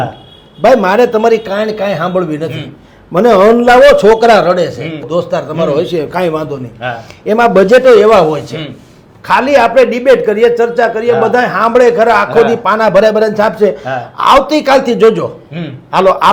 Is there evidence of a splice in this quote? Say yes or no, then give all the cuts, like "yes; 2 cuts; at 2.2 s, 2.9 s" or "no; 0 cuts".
no; 0 cuts